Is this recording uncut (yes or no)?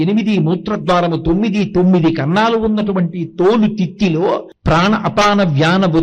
no